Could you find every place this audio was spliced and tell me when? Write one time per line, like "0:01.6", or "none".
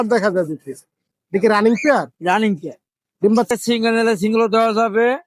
0:03.5